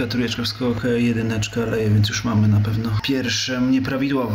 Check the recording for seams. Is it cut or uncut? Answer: cut